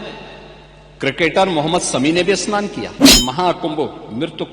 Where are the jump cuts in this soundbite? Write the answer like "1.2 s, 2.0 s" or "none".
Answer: 3.0 s

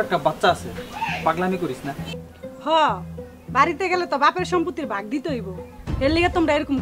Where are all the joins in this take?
none

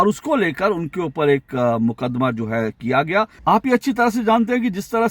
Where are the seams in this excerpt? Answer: 3.4 s

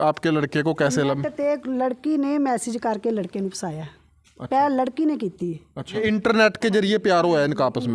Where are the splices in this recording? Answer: 5.9 s

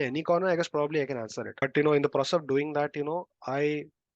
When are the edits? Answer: 1.6 s

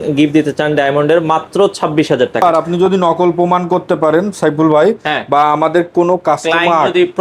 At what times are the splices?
2.7 s

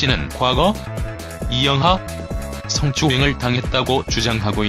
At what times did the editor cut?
3.7 s

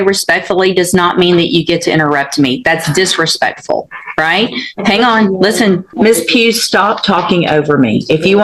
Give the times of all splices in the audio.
5.9 s

